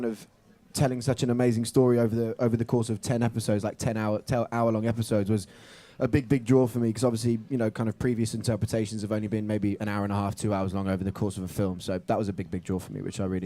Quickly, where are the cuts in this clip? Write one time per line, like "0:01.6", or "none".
0:03.4